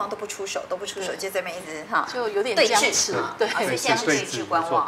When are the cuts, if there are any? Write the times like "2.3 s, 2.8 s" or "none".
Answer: none